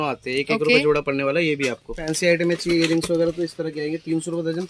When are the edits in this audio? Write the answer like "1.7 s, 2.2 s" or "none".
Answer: 2.0 s